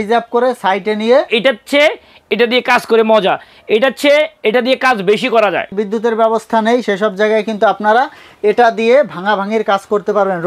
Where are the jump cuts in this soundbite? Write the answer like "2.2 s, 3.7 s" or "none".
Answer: 1.3 s, 5.8 s